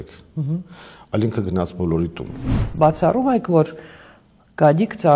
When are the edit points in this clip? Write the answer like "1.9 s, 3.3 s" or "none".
2.6 s